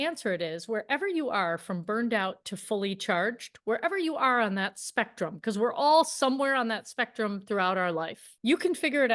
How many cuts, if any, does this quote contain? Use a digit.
1